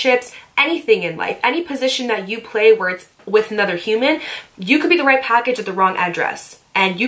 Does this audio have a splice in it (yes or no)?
no